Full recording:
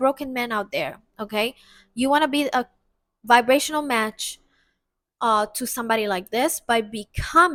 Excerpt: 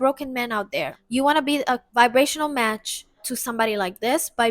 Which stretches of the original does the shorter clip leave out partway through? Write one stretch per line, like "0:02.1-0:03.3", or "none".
0:01.0-0:01.8
0:02.7-0:03.2
0:04.6-0:05.6